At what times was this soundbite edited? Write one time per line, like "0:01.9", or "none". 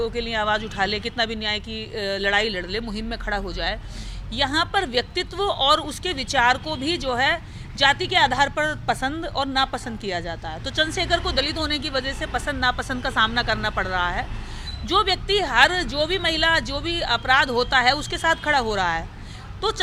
none